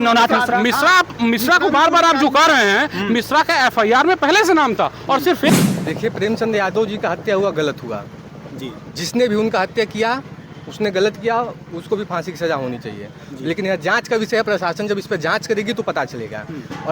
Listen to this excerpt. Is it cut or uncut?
cut